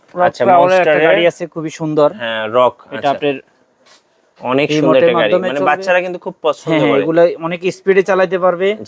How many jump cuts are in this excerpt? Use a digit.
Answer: 0